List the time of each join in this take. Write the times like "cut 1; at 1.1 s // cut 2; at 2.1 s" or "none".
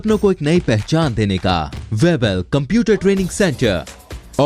cut 1; at 1.8 s